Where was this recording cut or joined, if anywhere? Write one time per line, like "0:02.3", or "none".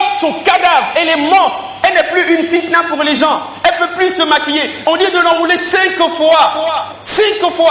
0:01.7
0:04.7